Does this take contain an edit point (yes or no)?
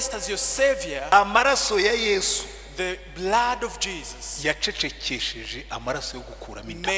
yes